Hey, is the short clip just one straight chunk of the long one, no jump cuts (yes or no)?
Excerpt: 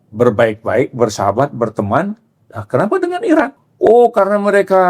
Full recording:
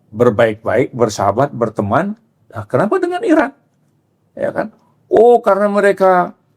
no